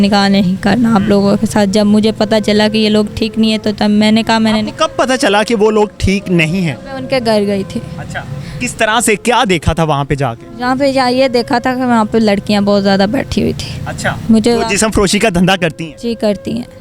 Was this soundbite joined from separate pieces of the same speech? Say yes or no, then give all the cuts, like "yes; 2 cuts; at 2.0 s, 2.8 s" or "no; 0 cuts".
no; 0 cuts